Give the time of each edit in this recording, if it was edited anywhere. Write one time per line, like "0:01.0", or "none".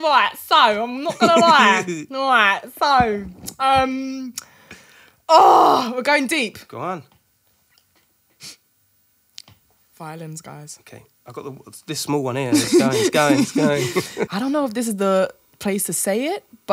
0:14.2